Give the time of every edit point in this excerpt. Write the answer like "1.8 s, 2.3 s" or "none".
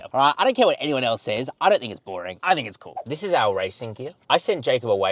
3.0 s